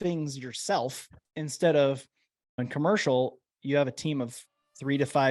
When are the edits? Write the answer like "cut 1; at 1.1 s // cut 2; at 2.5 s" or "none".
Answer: cut 1; at 2.6 s // cut 2; at 3.5 s